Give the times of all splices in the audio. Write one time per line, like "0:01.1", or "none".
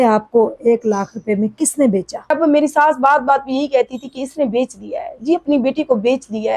0:02.3